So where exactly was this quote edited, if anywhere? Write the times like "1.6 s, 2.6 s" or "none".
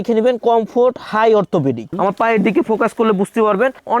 1.9 s